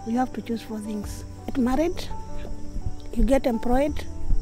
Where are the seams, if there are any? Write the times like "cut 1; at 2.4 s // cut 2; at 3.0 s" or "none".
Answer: cut 1; at 1.5 s